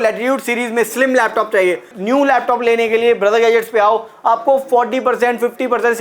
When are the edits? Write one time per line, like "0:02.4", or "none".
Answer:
0:01.9